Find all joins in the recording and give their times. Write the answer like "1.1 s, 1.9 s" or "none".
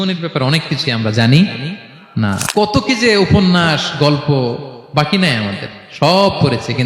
2.4 s